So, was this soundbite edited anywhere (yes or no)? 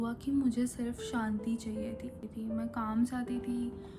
yes